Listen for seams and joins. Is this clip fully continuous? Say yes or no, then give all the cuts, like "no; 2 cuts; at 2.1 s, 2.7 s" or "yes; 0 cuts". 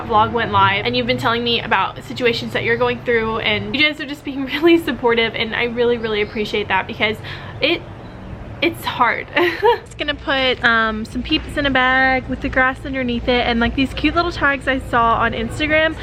no; 2 cuts; at 3.7 s, 9.8 s